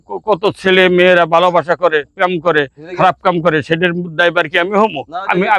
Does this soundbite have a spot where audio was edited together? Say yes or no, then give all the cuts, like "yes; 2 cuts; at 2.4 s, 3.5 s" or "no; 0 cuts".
no; 0 cuts